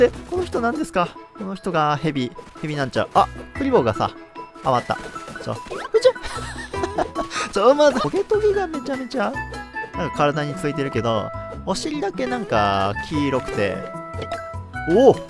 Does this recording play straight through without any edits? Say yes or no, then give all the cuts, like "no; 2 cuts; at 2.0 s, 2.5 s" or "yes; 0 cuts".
no; 1 cut; at 8.1 s